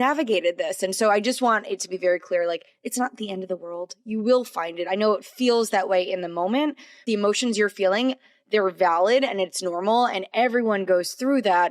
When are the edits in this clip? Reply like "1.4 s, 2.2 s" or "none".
6.9 s